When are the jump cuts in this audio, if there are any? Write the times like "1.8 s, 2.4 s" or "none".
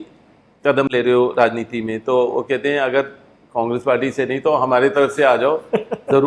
none